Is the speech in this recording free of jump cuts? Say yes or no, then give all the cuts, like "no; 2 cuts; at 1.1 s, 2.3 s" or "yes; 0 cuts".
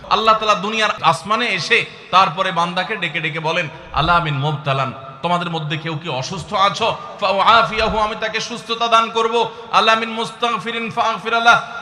no; 1 cut; at 1.0 s